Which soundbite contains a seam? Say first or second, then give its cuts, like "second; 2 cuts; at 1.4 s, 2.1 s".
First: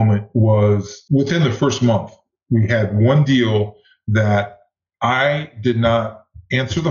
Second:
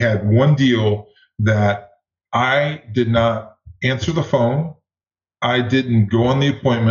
first; 1 cut; at 1.1 s